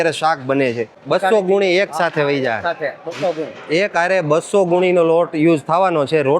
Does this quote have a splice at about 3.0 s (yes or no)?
no